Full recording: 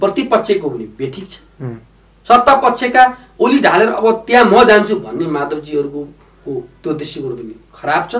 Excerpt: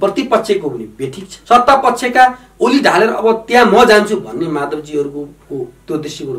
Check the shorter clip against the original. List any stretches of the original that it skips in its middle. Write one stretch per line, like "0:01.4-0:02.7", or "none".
0:01.3-0:02.1
0:06.2-0:06.3

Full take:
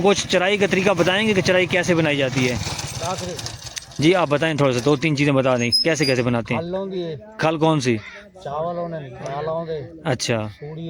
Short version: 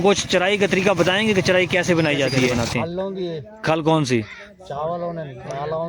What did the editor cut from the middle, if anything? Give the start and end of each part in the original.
0:02.5-0:06.3

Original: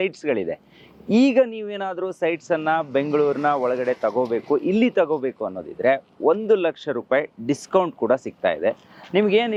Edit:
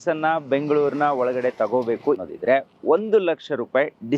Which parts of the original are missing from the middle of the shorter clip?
0:04.6-0:05.6

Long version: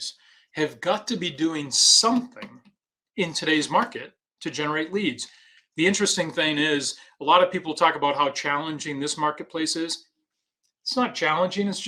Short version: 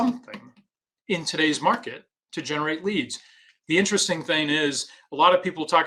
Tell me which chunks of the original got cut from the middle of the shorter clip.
none

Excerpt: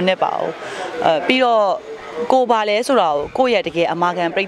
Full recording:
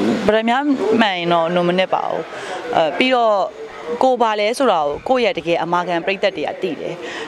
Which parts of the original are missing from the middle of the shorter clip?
none

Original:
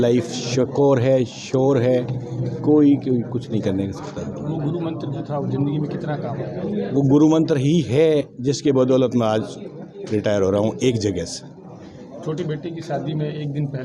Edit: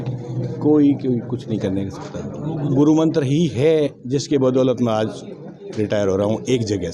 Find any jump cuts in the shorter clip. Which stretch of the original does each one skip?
0:04.7-0:07.1

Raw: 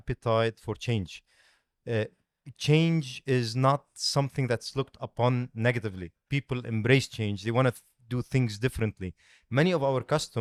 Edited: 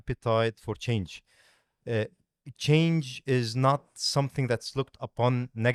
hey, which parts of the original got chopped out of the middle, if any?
none

